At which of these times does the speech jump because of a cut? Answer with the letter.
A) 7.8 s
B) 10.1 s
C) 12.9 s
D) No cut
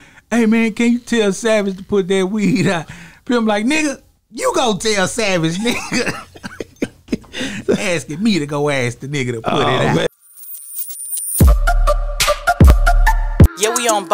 B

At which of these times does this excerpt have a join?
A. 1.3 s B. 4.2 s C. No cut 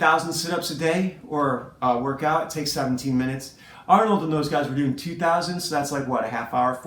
C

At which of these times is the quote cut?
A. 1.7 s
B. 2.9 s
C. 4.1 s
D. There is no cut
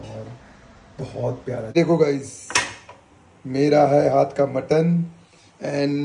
A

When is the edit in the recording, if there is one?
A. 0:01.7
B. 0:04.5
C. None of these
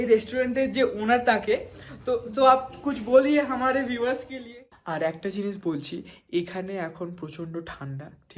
B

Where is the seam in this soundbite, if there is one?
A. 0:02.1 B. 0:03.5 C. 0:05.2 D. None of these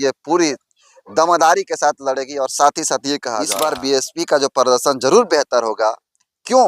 B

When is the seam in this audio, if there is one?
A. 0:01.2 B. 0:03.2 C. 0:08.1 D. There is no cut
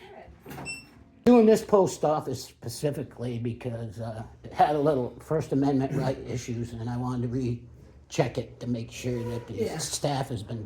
A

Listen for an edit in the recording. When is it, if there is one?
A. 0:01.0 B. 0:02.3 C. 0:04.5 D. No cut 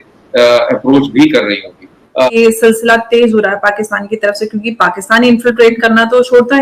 B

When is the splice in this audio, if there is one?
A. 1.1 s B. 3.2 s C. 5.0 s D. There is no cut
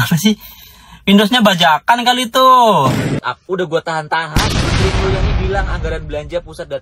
B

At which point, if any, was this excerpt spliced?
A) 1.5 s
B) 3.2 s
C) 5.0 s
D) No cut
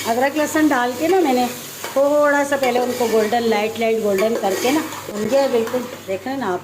C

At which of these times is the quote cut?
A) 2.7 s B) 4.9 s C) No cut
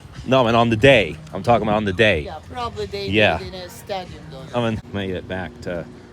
B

